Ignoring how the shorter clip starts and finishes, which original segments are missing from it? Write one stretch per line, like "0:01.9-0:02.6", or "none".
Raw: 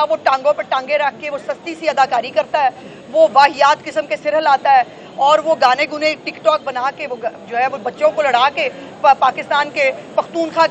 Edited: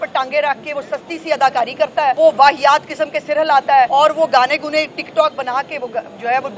0:02.7-0:03.1
0:04.9-0:05.2